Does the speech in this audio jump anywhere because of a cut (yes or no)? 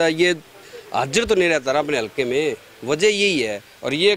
no